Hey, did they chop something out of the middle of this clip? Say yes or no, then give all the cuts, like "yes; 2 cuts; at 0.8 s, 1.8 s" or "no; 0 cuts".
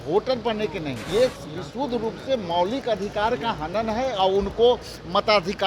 yes; 1 cut; at 1.0 s